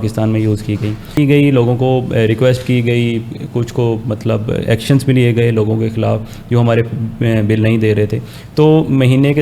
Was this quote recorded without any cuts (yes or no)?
no